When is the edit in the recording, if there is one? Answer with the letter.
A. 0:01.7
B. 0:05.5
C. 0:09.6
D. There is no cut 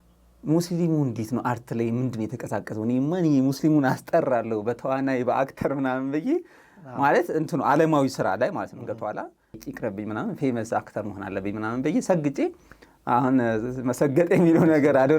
C